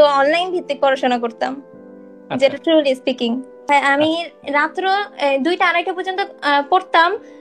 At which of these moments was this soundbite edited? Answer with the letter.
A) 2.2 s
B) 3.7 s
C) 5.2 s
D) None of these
B